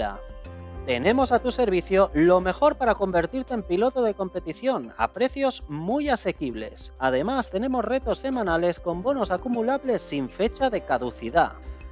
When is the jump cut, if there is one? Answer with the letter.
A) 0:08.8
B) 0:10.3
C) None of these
B